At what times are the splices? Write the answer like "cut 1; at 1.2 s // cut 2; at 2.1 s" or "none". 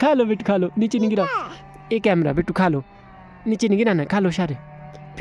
none